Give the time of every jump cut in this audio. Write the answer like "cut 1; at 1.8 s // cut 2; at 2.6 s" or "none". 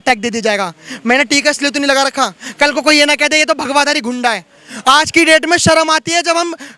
none